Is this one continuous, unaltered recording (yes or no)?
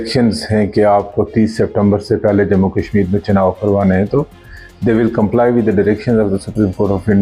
yes